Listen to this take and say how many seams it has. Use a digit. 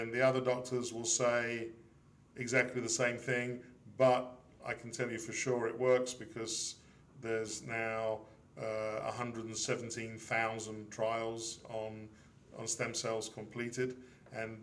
0